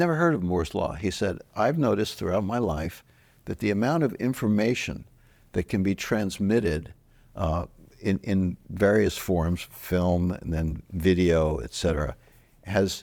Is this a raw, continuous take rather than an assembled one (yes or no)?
yes